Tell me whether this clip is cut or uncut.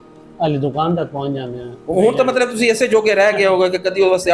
uncut